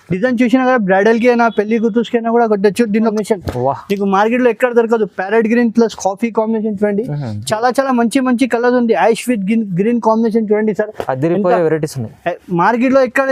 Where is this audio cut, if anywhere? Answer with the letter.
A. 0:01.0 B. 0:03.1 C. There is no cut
B